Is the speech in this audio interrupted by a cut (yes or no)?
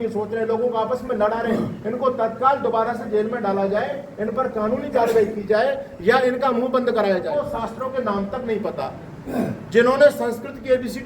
yes